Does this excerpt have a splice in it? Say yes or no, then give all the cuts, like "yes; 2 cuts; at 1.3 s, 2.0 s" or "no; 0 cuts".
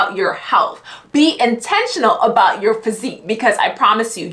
no; 0 cuts